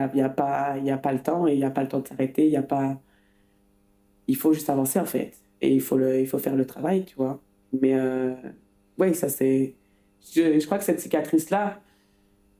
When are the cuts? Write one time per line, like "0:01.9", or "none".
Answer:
none